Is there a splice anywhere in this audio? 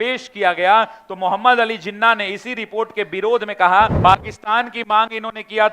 yes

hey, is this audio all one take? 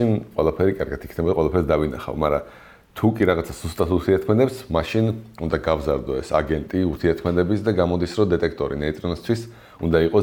yes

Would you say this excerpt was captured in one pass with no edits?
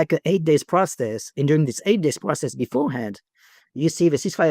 yes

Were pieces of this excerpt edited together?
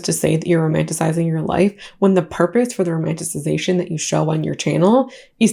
no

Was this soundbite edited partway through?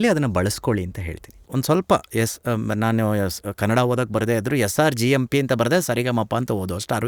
yes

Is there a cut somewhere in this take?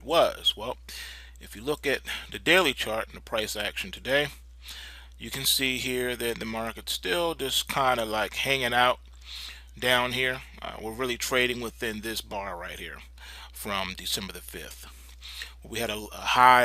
yes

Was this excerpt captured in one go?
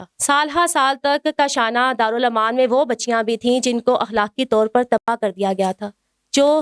yes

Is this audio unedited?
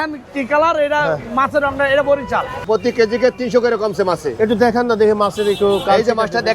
no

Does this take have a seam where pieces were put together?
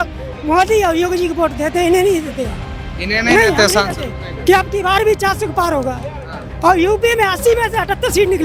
no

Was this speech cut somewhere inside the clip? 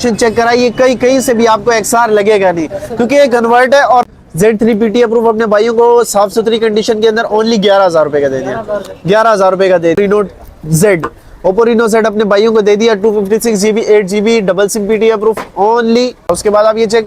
yes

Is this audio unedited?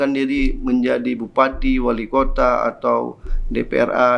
yes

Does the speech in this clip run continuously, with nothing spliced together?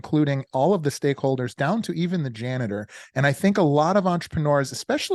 yes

